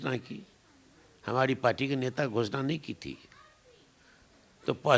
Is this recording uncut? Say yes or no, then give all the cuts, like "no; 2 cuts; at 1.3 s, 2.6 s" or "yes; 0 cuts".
yes; 0 cuts